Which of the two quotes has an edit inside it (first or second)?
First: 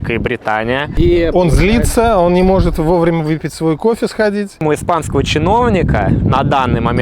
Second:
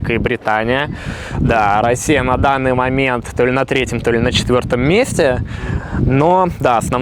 first